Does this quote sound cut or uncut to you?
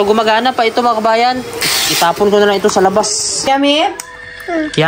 cut